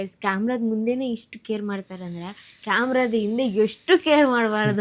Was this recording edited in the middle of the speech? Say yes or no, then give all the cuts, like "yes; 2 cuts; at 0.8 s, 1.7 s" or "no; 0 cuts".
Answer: no; 0 cuts